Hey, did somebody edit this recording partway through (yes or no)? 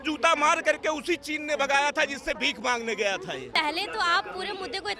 yes